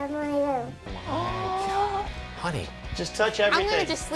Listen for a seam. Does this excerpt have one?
yes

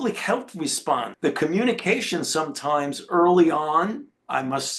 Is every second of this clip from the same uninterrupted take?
no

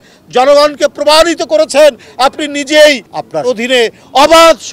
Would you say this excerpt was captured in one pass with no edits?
no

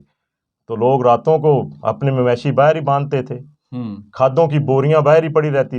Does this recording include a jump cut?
no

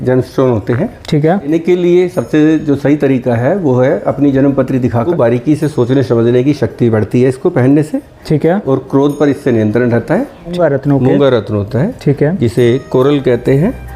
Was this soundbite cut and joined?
yes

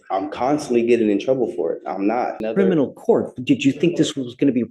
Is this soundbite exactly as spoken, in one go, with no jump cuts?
no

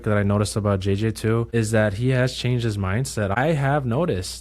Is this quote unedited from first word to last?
no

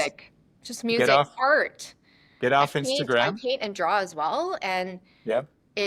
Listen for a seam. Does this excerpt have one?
no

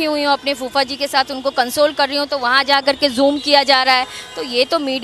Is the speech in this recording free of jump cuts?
yes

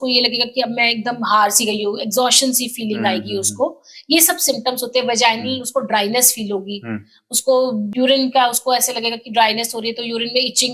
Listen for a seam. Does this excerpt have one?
yes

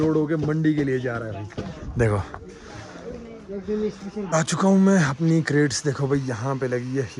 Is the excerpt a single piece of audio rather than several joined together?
no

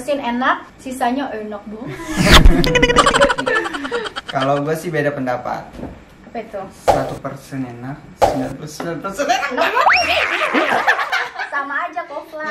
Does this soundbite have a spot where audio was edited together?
no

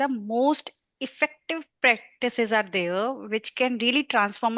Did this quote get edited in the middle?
no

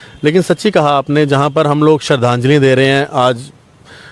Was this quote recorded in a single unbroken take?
yes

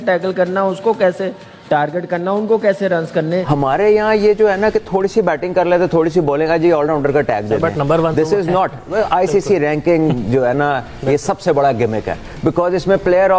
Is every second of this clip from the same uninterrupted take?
no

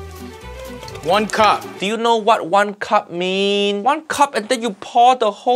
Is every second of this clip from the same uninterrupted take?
no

